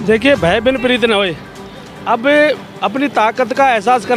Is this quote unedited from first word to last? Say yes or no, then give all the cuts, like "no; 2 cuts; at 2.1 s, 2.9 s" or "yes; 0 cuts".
yes; 0 cuts